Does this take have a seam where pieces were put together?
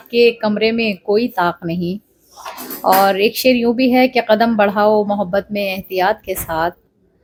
no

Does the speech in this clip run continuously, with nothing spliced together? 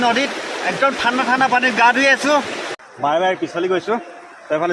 no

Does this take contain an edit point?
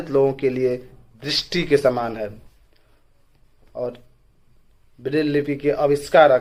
no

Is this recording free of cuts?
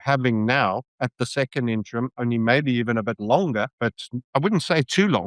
no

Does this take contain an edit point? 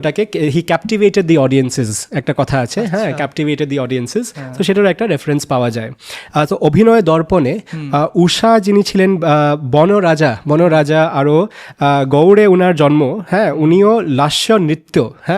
yes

